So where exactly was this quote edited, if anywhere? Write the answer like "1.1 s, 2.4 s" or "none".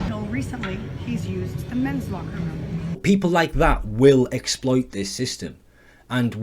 3.0 s